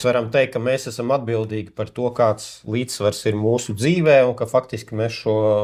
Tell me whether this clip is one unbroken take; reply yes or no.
yes